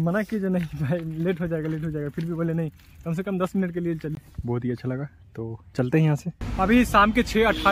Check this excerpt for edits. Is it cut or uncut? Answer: cut